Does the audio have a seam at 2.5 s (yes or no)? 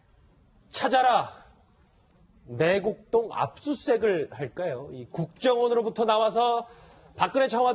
no